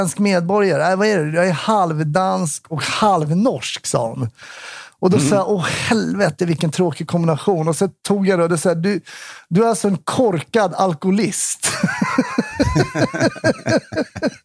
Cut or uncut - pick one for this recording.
uncut